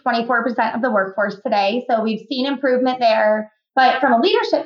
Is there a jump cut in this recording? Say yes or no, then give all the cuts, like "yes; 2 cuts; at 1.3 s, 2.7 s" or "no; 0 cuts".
yes; 1 cut; at 3.6 s